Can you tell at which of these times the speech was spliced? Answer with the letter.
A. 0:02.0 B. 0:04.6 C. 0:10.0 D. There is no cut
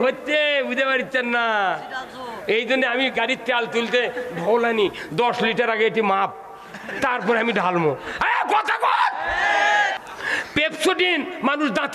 C